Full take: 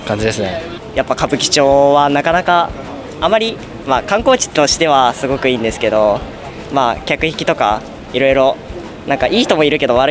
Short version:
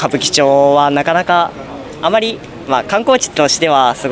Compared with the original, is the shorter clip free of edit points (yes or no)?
yes